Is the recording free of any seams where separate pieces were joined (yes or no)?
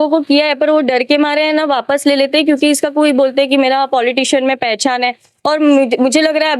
yes